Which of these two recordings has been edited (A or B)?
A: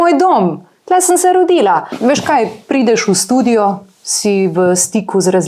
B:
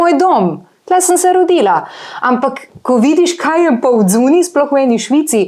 A